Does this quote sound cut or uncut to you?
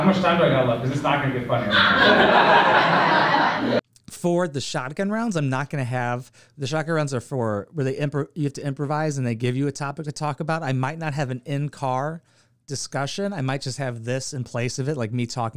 cut